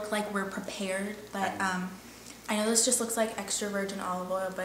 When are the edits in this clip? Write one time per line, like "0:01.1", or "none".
none